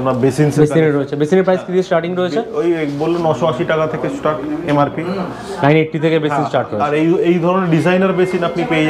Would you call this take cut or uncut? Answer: uncut